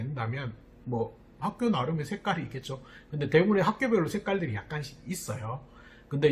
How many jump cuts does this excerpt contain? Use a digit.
0